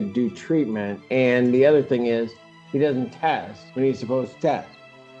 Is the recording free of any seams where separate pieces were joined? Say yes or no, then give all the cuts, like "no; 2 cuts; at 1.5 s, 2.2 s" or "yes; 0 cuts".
no; 2 cuts; at 1.0 s, 3.6 s